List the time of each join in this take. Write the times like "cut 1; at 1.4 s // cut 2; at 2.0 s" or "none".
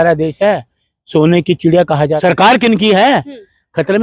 cut 1; at 2.2 s